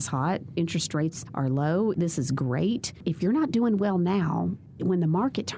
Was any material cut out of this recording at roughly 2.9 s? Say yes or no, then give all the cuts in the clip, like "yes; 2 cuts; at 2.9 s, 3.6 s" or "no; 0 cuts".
yes; 4 cuts; at 1.2 s, 1.9 s, 2.9 s, 4.7 s